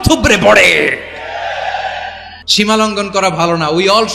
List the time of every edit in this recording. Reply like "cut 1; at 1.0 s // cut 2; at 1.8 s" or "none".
cut 1; at 2.3 s